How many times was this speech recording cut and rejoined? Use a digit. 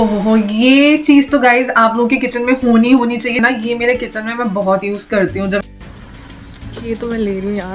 2